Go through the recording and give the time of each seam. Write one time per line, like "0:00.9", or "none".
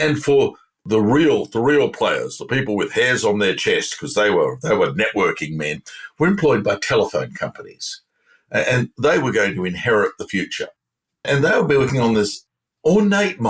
0:00.8
0:11.2

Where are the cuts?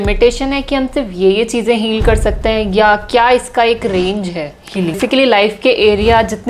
0:05.0

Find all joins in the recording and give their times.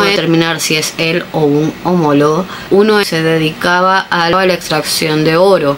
0:02.9

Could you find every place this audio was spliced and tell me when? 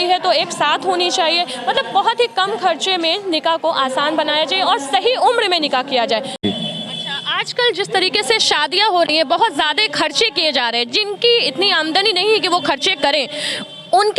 0:06.4

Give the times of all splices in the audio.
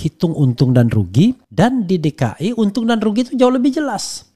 0:01.4

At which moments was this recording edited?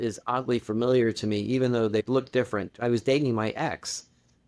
0:02.7

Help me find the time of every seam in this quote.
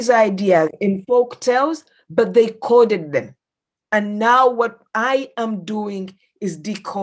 none

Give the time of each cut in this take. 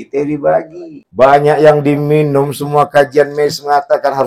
0:01.2

